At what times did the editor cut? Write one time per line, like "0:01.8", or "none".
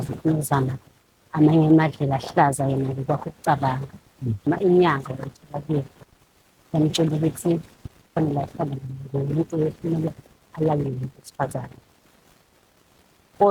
0:04.4

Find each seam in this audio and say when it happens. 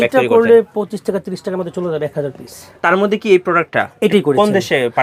0:02.6

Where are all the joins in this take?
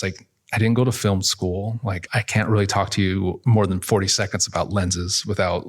0:02.0
0:03.4

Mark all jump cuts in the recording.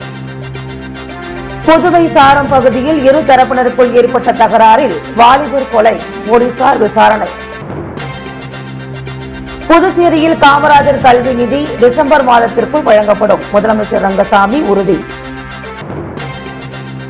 0:01.0

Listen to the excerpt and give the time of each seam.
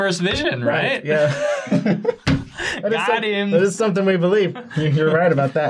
0:03.5

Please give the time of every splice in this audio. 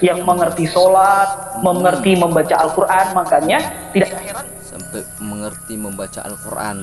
none

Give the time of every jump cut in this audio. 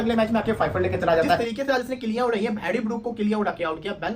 0:01.4

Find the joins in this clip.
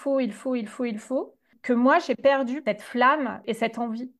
0:01.5
0:02.6
0:03.4

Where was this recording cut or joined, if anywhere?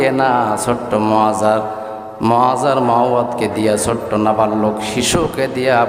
none

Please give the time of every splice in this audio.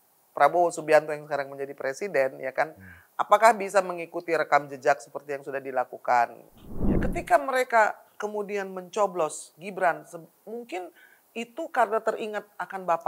0:06.8

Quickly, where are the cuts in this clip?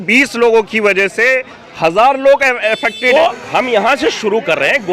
0:02.9

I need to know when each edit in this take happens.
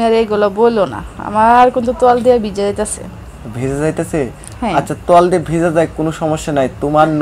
none

